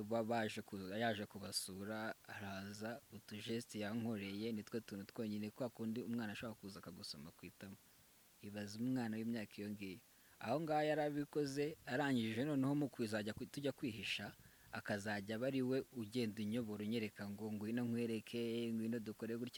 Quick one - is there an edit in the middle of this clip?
no; 0 cuts

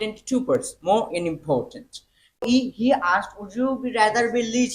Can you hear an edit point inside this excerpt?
yes; 1 cut; at 2.4 s

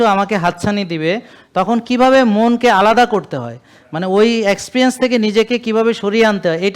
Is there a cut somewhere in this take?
no; 0 cuts

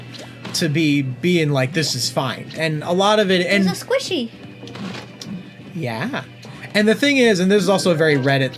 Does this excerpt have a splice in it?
no; 0 cuts

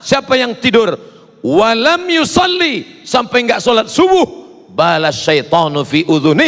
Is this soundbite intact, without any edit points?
yes; 0 cuts

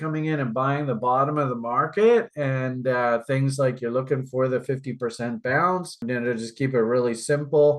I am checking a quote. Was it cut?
no; 0 cuts

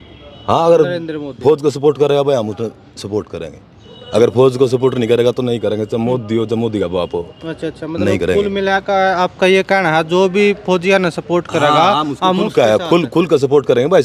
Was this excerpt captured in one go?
yes; 0 cuts

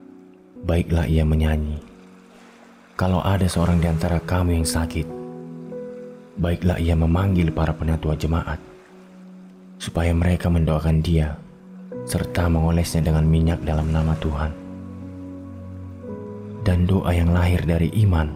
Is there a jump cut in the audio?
no; 0 cuts

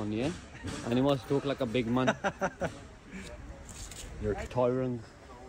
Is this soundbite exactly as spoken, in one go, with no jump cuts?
no; 1 cut; at 4.5 s

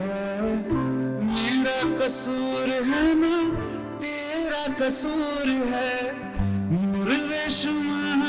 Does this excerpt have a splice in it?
no; 0 cuts

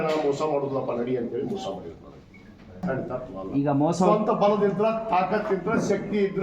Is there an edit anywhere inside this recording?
yes; 1 cut; at 2.8 s

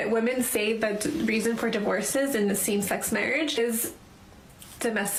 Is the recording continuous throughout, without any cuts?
yes; 0 cuts

